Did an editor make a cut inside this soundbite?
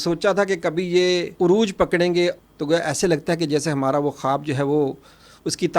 yes; 2 cuts; at 1.3 s, 2.4 s

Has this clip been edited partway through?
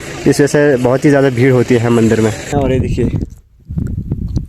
yes; 1 cut; at 2.5 s

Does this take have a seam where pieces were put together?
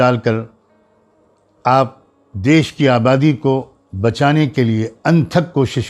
no; 0 cuts

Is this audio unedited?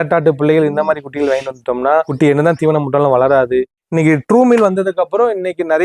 no; 2 cuts; at 2.1 s, 3.8 s

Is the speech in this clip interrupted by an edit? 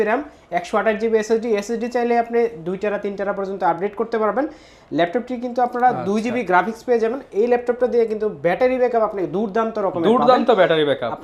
no; 0 cuts

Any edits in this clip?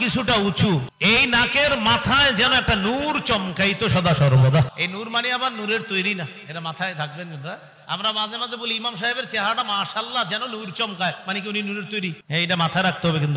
yes; 3 cuts; at 0.9 s, 4.7 s, 12.2 s

